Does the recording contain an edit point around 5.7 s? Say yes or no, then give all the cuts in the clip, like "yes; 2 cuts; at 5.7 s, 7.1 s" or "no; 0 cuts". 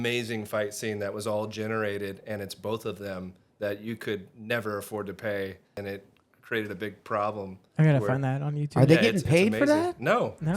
yes; 1 cut; at 5.7 s